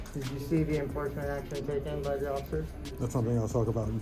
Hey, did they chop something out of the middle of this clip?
no; 0 cuts

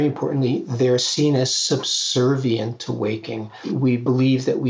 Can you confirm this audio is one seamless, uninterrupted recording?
no; 1 cut; at 3.7 s

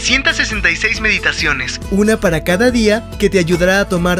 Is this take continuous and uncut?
yes; 0 cuts

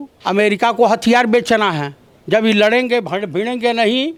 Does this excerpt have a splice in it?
no; 0 cuts

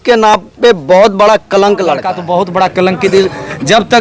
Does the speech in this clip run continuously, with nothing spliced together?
no; 1 cut; at 2.1 s

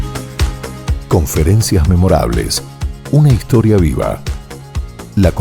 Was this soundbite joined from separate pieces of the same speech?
no; 0 cuts

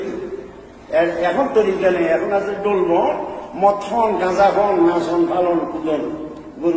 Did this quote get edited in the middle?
no; 0 cuts

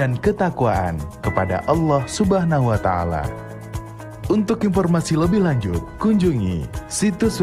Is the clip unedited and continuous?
no; 1 cut; at 6.5 s

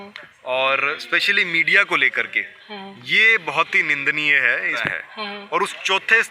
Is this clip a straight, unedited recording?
no; 1 cut; at 4.9 s

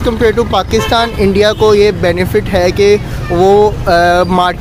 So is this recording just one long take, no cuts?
yes; 0 cuts

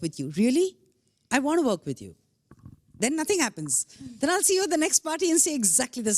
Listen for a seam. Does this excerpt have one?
no; 0 cuts

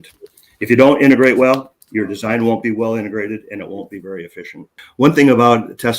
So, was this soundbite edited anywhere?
yes; 1 cut; at 4.7 s

